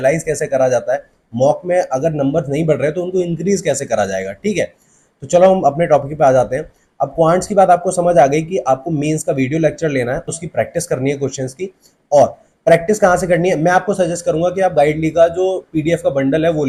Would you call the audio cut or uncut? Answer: uncut